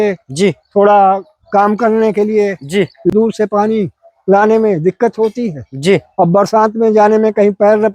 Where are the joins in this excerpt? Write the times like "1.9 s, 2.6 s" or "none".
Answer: 3.1 s